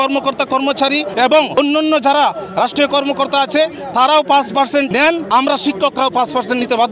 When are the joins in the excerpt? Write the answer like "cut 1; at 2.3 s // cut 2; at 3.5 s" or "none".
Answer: none

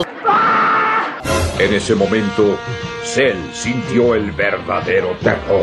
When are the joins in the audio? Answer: cut 1; at 1.2 s

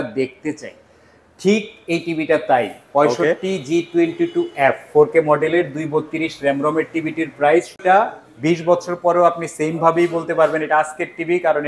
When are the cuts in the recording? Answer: cut 1; at 7.8 s

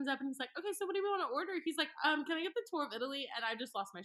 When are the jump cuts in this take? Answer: none

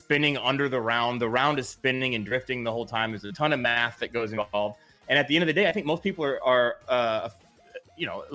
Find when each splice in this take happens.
none

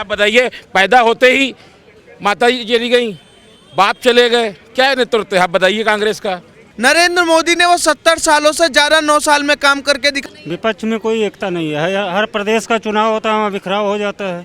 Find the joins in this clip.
cut 1; at 6.7 s // cut 2; at 10.3 s

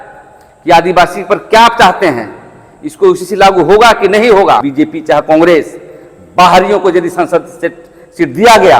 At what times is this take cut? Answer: cut 1; at 4.7 s

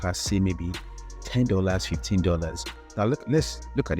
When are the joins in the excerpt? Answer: cut 1; at 2.8 s

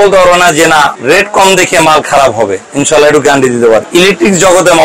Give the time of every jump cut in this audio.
cut 1; at 1.0 s // cut 2; at 3.9 s

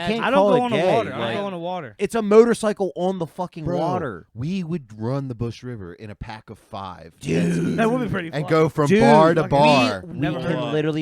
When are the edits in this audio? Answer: cut 1; at 1.9 s // cut 2; at 10.1 s

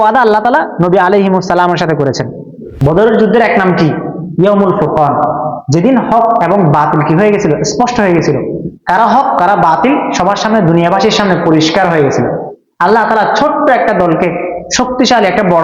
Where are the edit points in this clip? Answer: cut 1; at 2.7 s

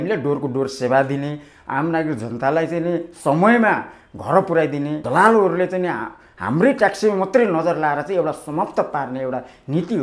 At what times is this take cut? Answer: cut 1; at 5.0 s

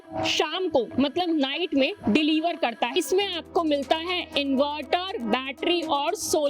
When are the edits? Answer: cut 1; at 2.9 s

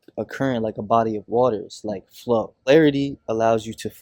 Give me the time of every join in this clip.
cut 1; at 2.7 s

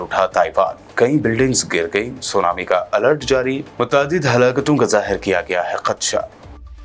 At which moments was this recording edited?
none

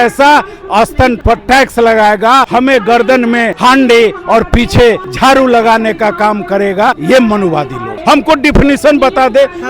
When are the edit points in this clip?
cut 1; at 1.2 s // cut 2; at 2.5 s // cut 3; at 3.5 s // cut 4; at 5.1 s // cut 5; at 7.0 s // cut 6; at 7.9 s

